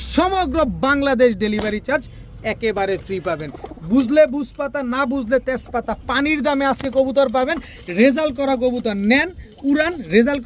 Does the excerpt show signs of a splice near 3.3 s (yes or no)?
no